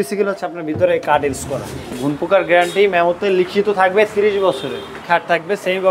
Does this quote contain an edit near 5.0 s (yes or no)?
yes